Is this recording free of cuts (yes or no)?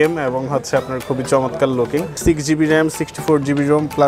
no